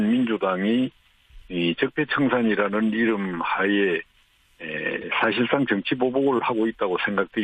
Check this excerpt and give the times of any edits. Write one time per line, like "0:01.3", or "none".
0:01.1